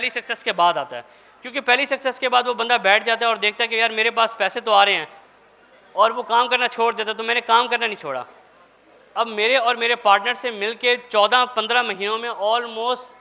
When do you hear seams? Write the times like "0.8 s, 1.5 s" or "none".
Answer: none

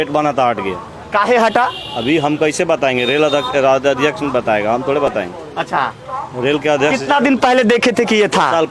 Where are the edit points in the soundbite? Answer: none

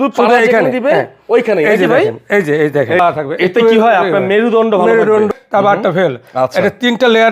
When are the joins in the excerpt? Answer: 3.0 s, 5.3 s

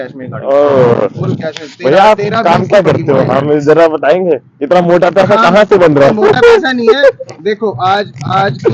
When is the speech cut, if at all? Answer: none

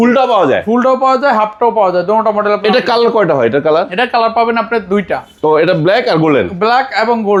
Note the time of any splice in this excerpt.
none

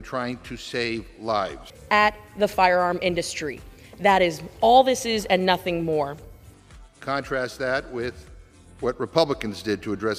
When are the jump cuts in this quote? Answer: none

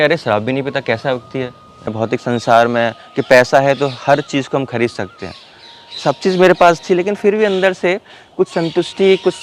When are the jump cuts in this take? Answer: 1.9 s

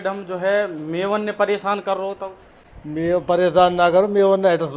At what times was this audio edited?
none

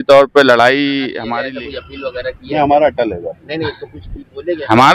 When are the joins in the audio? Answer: 1.2 s

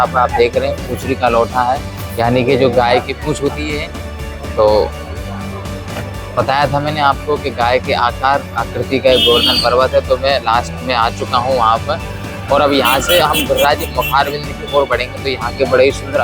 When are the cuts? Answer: none

